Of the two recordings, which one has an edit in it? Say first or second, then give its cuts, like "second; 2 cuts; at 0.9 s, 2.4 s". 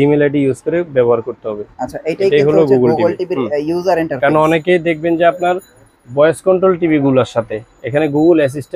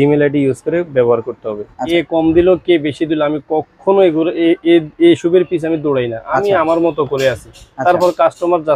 second; 1 cut; at 1.7 s